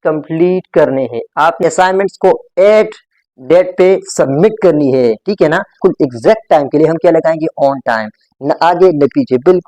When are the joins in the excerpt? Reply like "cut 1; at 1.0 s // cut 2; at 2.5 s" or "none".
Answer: cut 1; at 1.6 s // cut 2; at 5.8 s